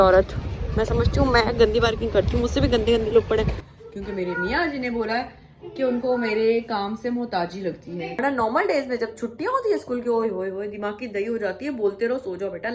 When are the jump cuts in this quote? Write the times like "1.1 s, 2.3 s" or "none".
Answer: 3.6 s, 8.2 s